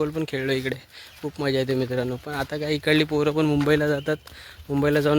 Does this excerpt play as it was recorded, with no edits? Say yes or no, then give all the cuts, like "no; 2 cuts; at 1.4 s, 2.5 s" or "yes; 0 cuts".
yes; 0 cuts